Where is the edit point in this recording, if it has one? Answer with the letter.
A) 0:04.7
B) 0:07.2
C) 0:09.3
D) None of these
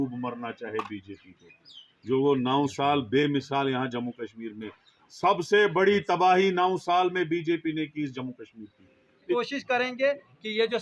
C